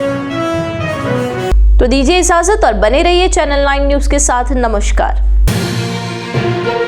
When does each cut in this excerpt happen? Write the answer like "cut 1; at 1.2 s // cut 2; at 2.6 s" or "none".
none